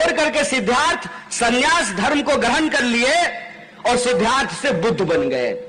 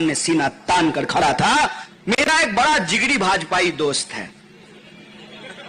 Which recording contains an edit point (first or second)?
second